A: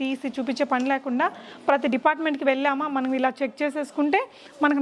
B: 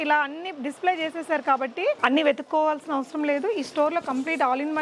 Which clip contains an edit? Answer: B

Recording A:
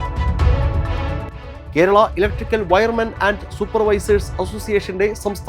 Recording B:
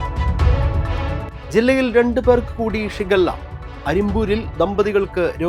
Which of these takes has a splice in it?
B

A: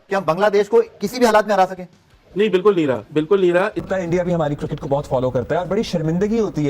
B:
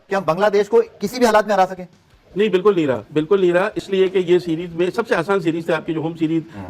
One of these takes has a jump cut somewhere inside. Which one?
A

